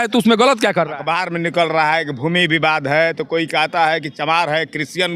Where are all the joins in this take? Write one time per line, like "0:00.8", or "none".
0:01.0